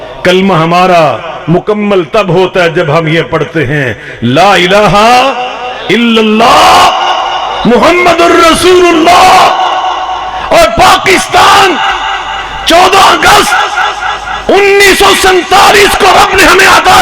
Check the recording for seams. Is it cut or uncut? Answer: uncut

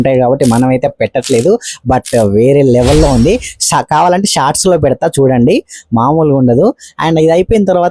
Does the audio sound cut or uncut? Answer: uncut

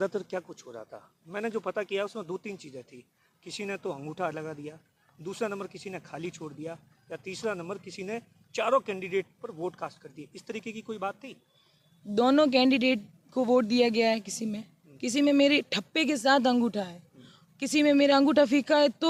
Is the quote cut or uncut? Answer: uncut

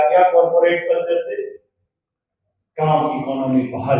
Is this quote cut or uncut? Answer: uncut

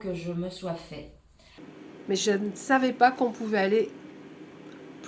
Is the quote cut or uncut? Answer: cut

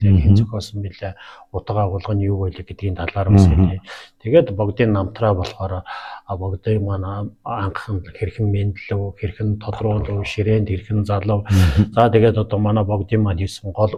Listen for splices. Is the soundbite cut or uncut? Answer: uncut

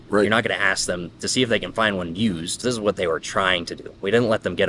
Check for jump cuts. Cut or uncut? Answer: cut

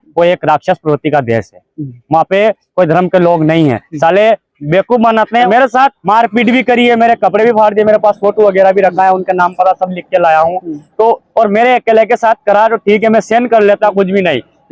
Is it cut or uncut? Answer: cut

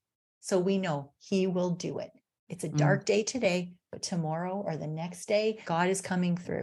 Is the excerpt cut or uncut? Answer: cut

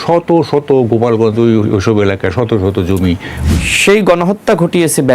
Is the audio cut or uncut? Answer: cut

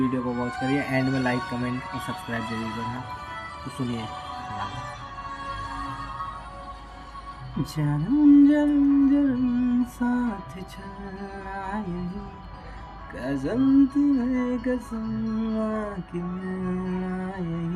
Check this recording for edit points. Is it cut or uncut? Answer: uncut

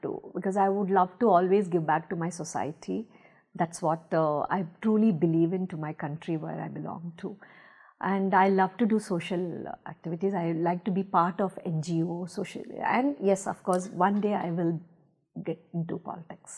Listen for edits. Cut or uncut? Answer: uncut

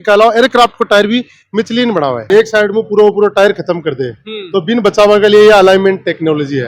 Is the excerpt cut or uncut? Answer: cut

